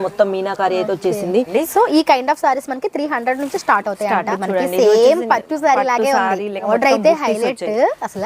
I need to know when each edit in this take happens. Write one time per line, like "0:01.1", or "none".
0:01.5
0:04.3
0:06.7